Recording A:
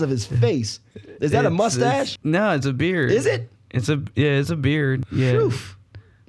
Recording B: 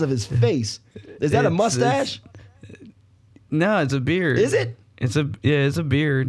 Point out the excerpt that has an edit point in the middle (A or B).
A